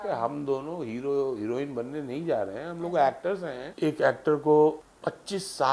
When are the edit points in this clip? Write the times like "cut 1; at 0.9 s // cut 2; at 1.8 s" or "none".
cut 1; at 3.6 s // cut 2; at 4.9 s